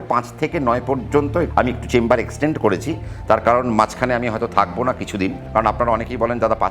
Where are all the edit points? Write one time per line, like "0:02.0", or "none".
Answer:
0:01.5
0:05.4